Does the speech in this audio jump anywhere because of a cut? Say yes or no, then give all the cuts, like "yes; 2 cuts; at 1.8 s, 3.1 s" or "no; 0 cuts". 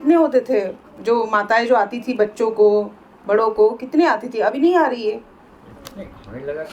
no; 0 cuts